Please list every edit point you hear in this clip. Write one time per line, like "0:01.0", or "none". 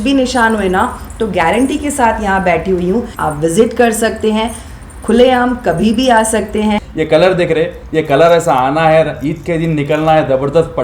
0:03.2
0:06.9